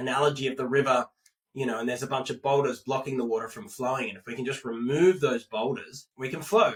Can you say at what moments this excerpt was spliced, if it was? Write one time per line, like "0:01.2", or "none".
none